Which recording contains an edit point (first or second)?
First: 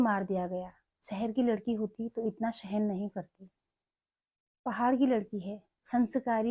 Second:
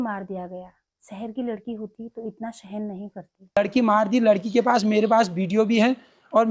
second